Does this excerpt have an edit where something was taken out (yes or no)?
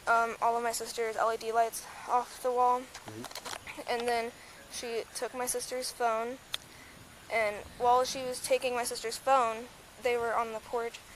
no